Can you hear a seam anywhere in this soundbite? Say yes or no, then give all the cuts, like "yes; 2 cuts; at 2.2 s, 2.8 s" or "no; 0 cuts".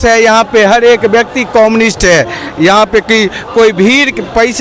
no; 0 cuts